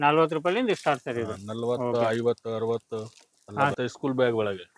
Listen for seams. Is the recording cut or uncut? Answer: cut